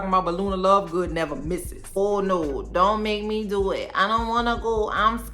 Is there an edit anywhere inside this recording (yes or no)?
yes